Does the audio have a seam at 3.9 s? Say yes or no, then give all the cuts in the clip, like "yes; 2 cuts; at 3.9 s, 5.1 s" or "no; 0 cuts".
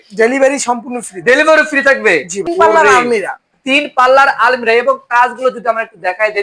no; 1 cut; at 2.5 s